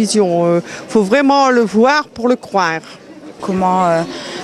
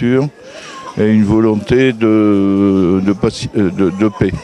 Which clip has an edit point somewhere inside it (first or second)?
first